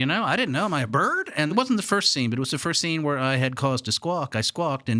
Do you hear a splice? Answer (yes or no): yes